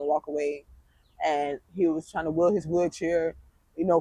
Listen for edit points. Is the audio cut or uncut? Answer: uncut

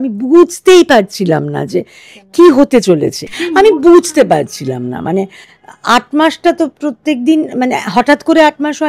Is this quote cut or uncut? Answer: uncut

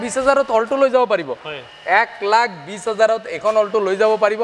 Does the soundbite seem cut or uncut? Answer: uncut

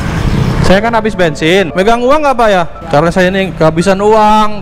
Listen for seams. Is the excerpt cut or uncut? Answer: cut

